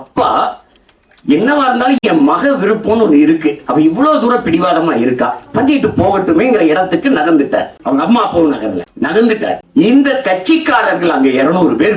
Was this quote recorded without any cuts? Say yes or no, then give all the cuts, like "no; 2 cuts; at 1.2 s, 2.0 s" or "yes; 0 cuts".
yes; 0 cuts